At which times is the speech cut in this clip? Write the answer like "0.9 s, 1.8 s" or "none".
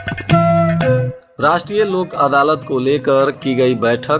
1.2 s